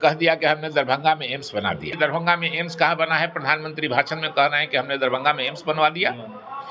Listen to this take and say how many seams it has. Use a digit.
1